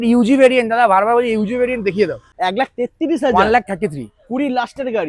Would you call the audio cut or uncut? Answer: cut